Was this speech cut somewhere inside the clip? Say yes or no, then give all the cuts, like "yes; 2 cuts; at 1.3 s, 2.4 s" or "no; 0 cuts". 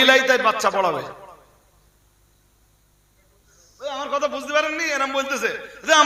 no; 0 cuts